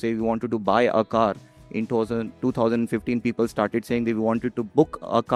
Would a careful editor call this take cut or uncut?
uncut